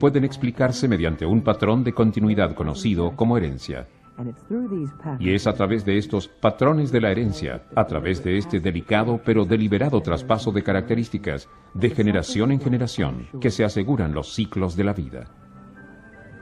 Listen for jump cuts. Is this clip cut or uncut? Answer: cut